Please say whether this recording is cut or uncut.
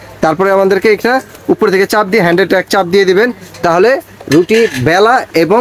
uncut